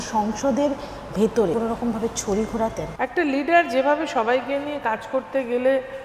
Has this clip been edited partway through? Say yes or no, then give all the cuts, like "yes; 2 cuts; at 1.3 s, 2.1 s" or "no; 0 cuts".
yes; 2 cuts; at 1.5 s, 2.9 s